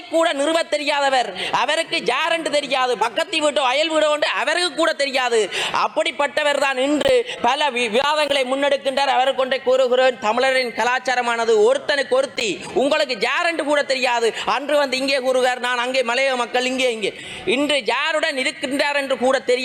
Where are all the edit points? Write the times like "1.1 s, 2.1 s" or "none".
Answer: none